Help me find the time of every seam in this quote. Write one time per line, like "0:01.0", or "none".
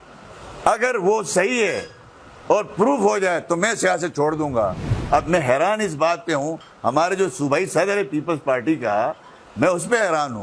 0:04.9